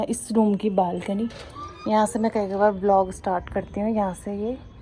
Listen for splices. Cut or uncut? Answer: uncut